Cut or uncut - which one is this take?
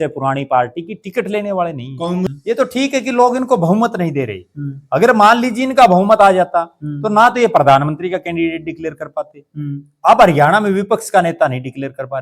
cut